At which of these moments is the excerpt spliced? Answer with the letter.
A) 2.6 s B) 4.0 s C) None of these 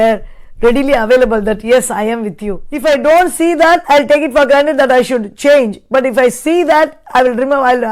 A